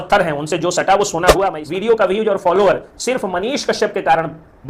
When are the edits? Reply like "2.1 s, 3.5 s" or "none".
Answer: 1.6 s